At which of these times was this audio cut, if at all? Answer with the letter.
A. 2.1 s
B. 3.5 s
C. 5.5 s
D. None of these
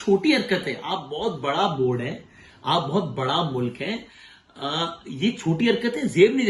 D